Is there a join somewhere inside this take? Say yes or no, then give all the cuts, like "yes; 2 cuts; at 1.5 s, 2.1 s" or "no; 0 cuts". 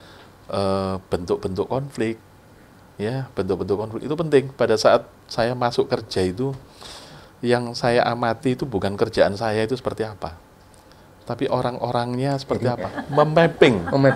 yes; 1 cut; at 12.9 s